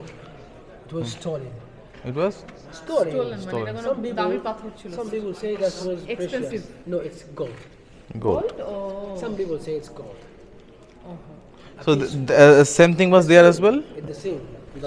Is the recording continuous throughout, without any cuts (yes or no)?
yes